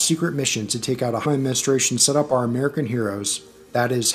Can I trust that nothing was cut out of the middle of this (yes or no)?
yes